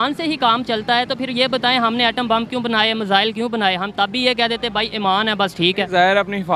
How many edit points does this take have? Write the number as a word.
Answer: zero